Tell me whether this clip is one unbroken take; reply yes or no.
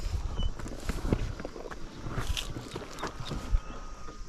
yes